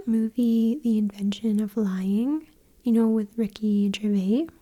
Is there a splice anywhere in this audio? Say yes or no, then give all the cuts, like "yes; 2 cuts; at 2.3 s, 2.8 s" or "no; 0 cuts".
no; 0 cuts